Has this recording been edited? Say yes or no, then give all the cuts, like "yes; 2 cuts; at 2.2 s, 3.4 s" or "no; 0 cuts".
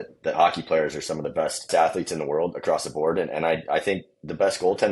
yes; 1 cut; at 1.7 s